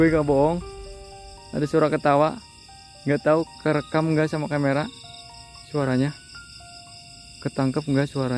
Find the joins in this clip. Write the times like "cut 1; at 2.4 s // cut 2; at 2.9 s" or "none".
none

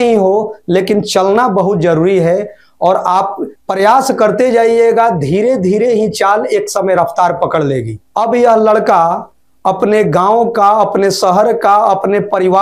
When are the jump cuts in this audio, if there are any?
none

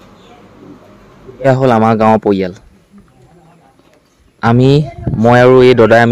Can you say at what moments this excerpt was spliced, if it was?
cut 1; at 1.4 s

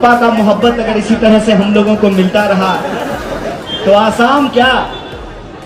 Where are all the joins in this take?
none

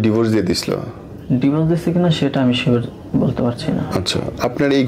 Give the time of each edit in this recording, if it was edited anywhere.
none

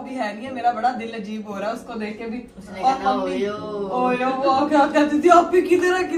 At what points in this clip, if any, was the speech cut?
none

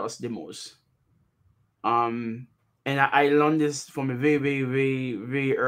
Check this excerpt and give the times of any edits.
none

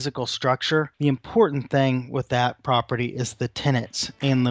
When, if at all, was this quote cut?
cut 1; at 0.9 s

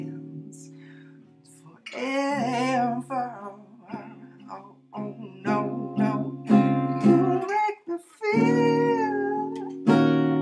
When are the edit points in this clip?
none

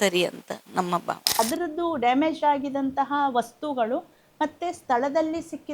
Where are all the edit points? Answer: cut 1; at 1.4 s

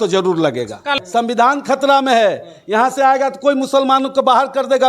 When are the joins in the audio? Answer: cut 1; at 1.0 s

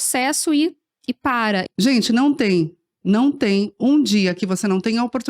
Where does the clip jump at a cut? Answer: cut 1; at 1.6 s

